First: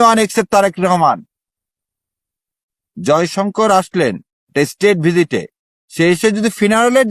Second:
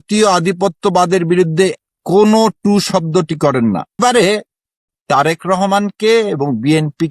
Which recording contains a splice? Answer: second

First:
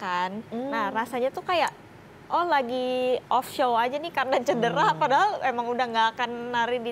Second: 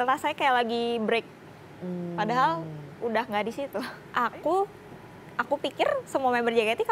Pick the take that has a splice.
second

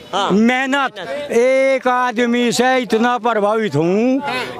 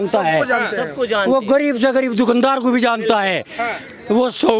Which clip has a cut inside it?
first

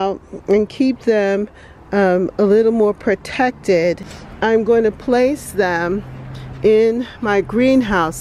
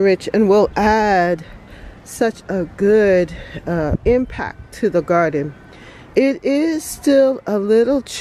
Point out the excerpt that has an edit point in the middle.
first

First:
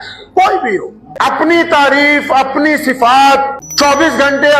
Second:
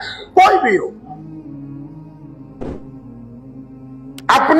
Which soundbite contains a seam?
first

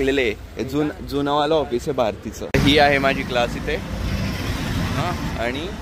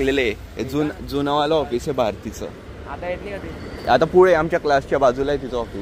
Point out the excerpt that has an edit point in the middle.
first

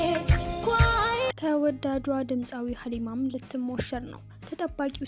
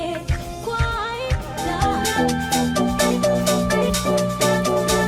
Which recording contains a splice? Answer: second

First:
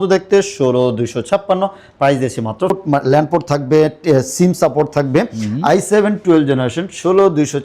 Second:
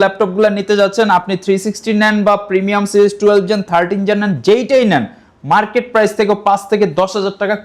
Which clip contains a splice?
first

